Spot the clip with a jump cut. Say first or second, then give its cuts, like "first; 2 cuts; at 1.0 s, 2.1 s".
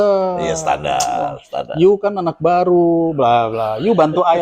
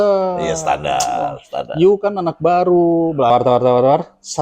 second; 1 cut; at 3.3 s